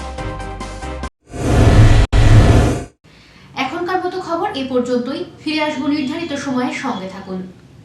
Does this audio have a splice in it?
no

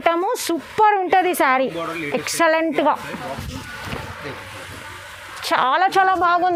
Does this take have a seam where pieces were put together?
no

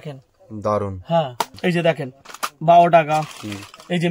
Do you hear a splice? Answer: yes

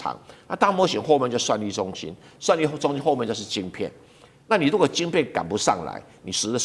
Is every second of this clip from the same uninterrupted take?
yes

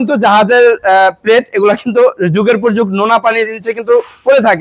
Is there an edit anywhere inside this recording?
no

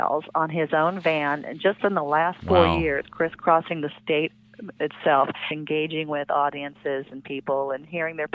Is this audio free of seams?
no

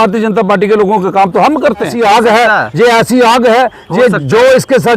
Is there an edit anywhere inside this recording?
yes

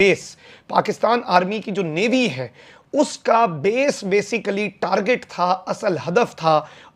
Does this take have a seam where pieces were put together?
no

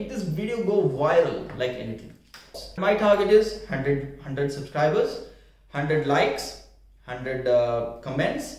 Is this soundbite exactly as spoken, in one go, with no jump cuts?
no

